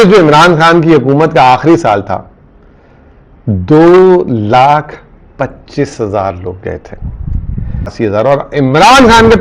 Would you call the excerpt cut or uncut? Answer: cut